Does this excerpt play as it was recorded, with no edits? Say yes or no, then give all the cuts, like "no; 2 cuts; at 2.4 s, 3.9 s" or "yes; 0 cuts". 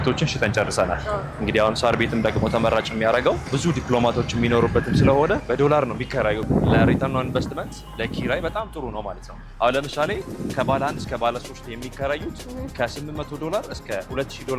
no; 3 cuts; at 3.5 s, 5.4 s, 6.4 s